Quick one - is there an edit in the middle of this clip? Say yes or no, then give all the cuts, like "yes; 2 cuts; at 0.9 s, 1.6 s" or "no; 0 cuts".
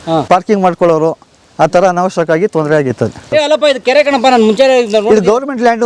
yes; 1 cut; at 3.2 s